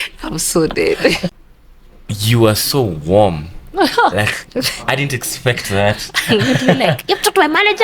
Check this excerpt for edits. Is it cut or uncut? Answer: cut